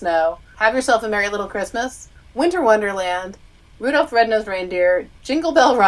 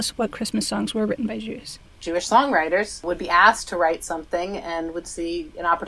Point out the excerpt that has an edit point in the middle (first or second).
second